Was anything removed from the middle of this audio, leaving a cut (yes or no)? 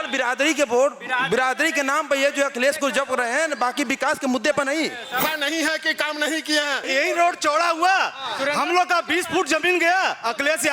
yes